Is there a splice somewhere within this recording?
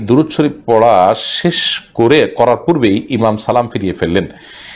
no; 0 cuts

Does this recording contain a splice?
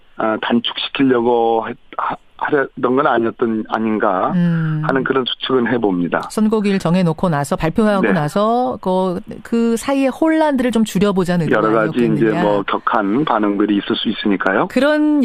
no; 0 cuts

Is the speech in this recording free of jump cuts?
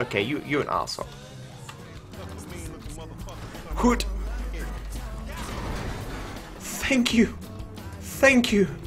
no; 1 cut; at 2.0 s

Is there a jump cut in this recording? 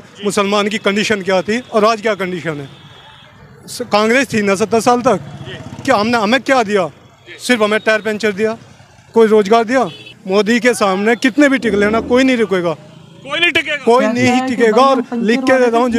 yes; 1 cut; at 10.2 s

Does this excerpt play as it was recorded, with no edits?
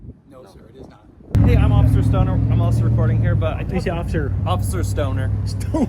no; 1 cut; at 1.4 s

